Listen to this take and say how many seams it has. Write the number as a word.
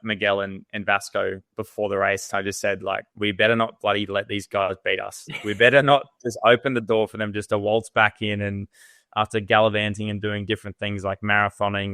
one